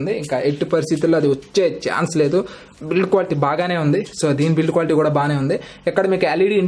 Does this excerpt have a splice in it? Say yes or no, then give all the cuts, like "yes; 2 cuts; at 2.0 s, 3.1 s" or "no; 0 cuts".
no; 0 cuts